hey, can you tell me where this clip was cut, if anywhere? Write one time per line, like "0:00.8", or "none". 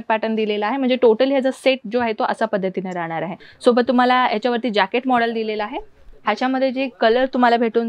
0:03.4